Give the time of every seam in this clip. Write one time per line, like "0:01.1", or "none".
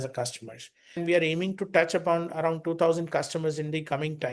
0:01.0